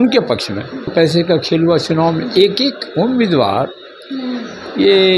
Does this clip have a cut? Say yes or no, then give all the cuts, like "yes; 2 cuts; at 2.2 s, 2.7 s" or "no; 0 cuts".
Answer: yes; 1 cut; at 0.9 s